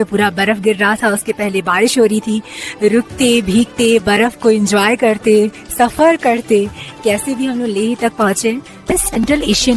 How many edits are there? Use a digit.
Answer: 1